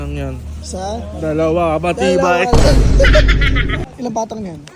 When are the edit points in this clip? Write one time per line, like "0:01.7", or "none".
0:03.8